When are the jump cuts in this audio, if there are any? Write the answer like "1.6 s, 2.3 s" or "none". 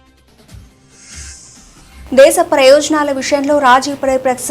2.1 s